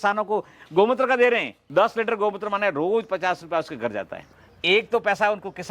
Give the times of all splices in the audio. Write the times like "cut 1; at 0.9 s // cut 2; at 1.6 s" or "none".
cut 1; at 1.6 s // cut 2; at 4.4 s